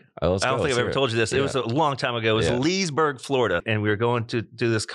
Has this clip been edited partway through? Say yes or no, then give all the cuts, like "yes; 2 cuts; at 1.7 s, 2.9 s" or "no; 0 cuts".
yes; 1 cut; at 3.6 s